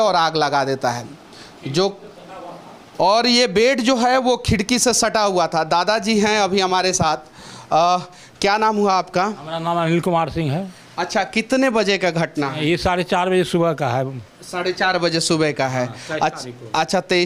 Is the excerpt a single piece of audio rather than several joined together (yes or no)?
yes